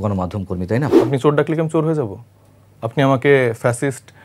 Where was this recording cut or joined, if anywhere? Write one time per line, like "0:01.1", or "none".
0:01.0